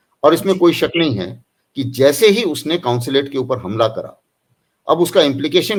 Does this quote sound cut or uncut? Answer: uncut